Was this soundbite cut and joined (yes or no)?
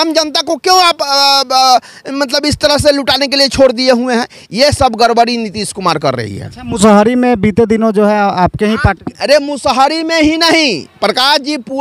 no